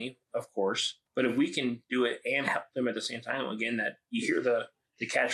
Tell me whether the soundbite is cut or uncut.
cut